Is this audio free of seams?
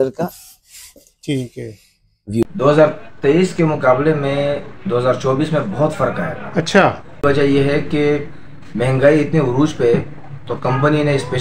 no; 2 cuts; at 2.5 s, 7.2 s

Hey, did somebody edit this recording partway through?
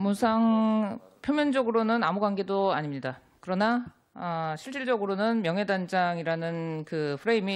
yes; 1 cut; at 6.1 s

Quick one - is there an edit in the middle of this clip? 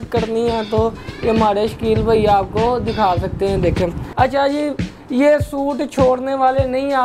yes; 1 cut; at 4.0 s

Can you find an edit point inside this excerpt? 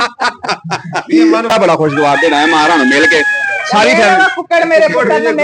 yes; 1 cut; at 1.5 s

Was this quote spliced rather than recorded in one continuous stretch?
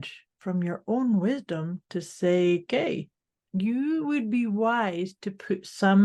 yes; 1 cut; at 3.4 s

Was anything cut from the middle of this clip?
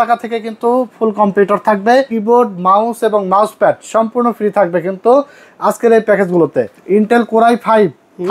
yes; 2 cuts; at 2.1 s, 6.7 s

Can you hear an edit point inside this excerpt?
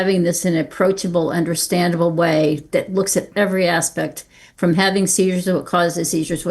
no; 0 cuts

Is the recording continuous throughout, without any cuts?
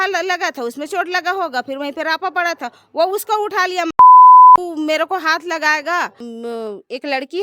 no; 3 cuts; at 4.0 s, 4.6 s, 6.3 s

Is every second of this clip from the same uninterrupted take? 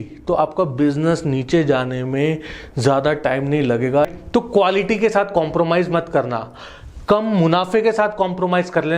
no; 1 cut; at 4.1 s

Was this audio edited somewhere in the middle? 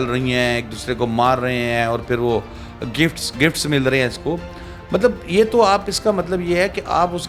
no; 0 cuts

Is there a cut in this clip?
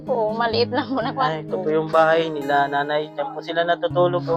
no; 0 cuts

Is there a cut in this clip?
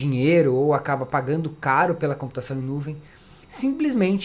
no; 0 cuts

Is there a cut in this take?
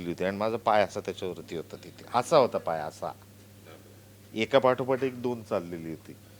no; 0 cuts

